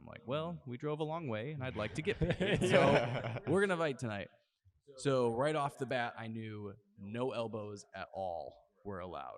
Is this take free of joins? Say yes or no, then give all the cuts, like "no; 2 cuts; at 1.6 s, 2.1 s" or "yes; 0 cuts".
yes; 0 cuts